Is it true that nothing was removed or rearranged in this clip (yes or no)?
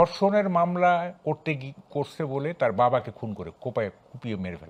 yes